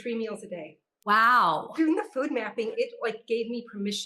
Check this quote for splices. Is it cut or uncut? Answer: cut